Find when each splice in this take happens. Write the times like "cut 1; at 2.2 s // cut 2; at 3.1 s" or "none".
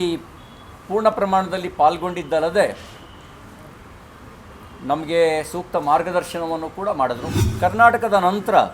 cut 1; at 7.4 s